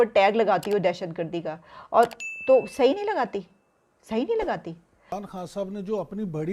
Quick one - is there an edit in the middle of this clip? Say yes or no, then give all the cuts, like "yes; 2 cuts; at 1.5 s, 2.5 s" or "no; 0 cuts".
yes; 1 cut; at 4.9 s